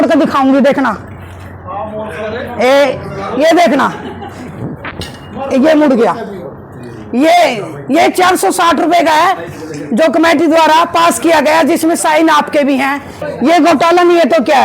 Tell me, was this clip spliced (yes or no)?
yes